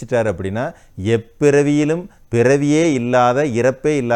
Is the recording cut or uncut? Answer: uncut